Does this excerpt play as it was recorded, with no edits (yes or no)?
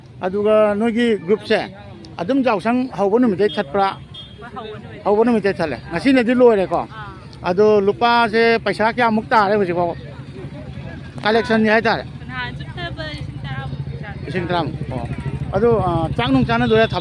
yes